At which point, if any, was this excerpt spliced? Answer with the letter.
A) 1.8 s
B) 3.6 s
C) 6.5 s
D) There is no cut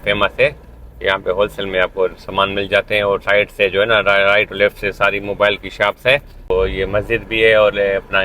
C